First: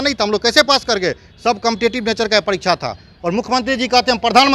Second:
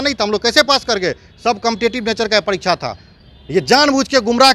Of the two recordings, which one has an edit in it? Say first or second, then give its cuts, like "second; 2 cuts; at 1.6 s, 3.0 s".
first; 1 cut; at 3.1 s